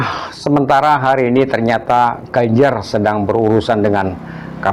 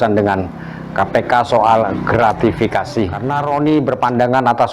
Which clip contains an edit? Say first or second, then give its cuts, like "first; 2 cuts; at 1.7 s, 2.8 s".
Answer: second; 1 cut; at 3.2 s